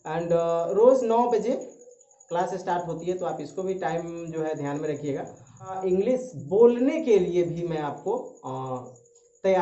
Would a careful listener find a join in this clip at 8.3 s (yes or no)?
no